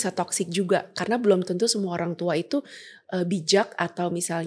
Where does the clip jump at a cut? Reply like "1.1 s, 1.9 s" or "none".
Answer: none